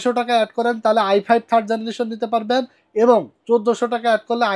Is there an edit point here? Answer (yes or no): no